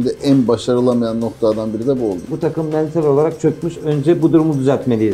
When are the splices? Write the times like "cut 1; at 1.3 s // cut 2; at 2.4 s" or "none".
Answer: cut 1; at 2.2 s

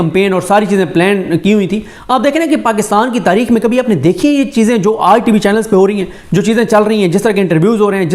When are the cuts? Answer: cut 1; at 1.9 s

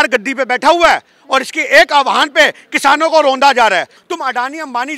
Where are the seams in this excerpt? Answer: cut 1; at 4.0 s

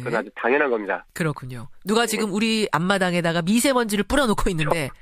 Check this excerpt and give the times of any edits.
cut 1; at 2.1 s

